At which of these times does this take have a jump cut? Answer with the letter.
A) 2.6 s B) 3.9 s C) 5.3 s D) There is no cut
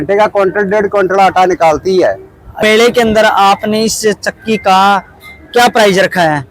A